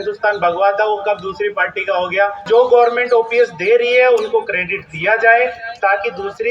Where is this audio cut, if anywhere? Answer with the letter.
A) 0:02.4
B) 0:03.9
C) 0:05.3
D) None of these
A